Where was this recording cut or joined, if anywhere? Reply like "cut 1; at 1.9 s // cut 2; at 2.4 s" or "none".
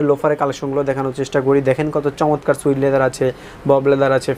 none